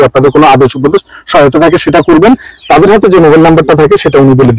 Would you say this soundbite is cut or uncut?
uncut